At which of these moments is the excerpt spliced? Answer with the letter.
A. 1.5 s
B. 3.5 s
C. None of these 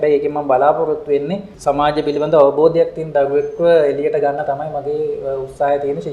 A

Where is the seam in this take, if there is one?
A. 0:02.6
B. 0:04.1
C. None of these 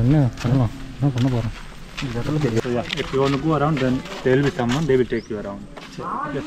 A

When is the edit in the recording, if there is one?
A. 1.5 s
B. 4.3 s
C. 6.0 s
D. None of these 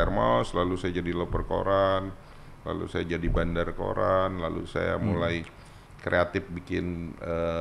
D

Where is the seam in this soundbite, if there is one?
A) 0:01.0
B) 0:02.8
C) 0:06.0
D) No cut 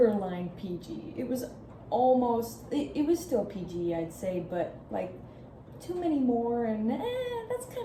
D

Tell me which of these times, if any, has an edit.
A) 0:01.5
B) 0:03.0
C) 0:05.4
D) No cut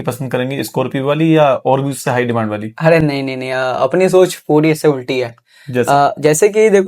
D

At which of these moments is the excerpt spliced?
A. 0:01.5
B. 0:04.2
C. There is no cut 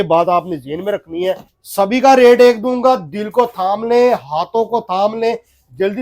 A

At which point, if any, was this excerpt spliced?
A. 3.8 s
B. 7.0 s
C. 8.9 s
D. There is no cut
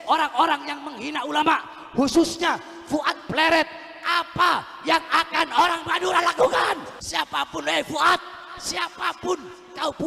B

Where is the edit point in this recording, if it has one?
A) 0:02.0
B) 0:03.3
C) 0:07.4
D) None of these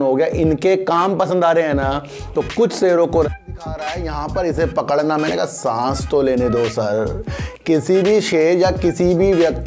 B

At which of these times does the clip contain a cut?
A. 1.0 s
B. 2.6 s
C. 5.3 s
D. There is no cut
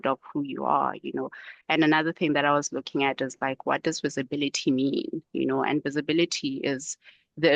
D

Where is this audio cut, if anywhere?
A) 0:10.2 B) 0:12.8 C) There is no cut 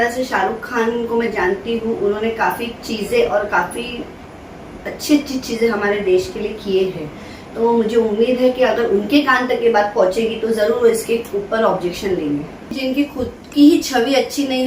B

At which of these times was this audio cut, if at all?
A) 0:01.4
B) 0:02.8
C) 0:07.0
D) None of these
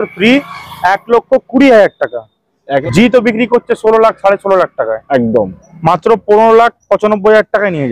B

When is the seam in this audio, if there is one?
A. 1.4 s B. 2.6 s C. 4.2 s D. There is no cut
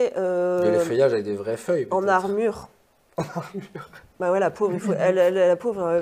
D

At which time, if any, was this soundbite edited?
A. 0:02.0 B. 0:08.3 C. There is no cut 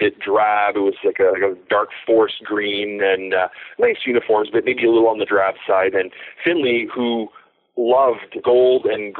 B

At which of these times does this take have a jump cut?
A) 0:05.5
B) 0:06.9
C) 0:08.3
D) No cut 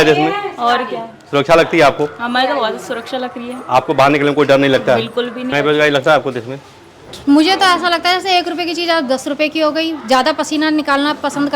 A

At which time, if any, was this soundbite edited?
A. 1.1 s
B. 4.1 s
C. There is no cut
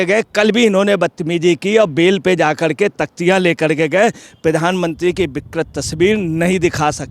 C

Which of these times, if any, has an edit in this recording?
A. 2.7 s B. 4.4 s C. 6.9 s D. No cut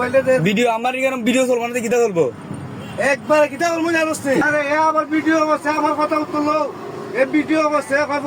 B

